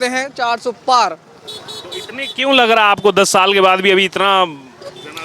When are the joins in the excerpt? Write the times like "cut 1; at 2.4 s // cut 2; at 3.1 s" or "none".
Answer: none